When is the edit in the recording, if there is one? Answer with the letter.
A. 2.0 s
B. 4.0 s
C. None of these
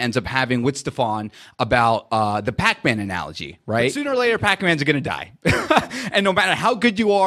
B